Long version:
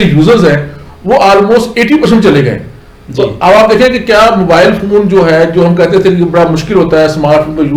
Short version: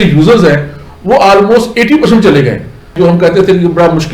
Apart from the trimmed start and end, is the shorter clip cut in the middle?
yes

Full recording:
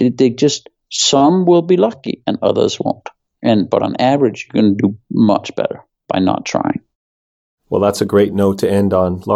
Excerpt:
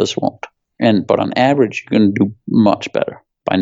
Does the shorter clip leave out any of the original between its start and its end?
no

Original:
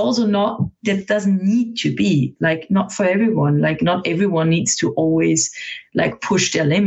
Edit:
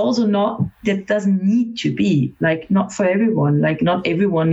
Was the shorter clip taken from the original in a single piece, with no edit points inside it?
yes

